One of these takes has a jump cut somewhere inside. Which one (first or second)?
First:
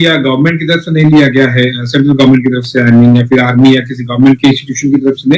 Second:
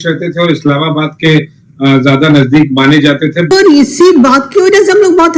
second